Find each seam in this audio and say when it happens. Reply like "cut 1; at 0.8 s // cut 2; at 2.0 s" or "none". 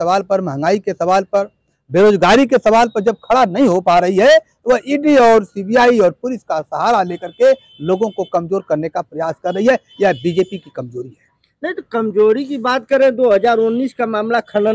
none

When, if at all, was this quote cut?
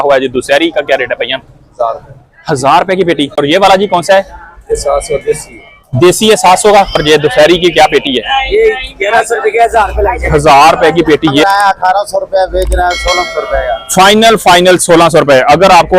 cut 1; at 3.4 s // cut 2; at 7.0 s // cut 3; at 11.4 s

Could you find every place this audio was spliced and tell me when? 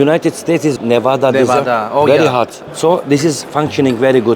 cut 1; at 0.8 s // cut 2; at 2.6 s // cut 3; at 3.4 s

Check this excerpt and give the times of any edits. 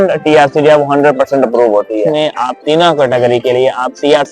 cut 1; at 2.1 s

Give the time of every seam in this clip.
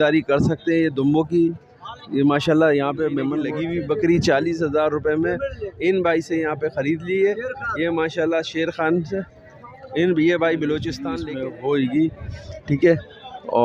cut 1; at 3.4 s // cut 2; at 11.0 s

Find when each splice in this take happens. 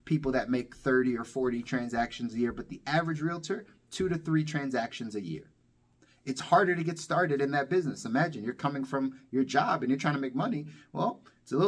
none

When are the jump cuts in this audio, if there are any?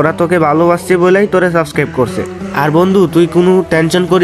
cut 1; at 2.4 s

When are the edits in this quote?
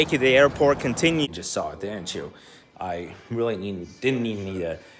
cut 1; at 1.3 s

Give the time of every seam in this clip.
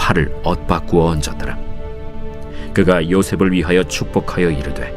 cut 1; at 2.0 s

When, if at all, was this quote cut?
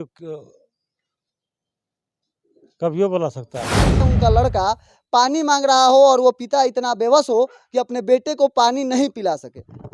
cut 1; at 4.0 s

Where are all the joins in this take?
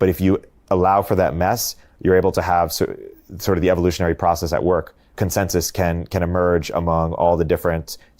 cut 1; at 5.1 s

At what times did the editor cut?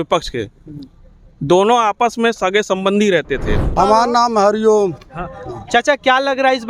cut 1; at 3.7 s

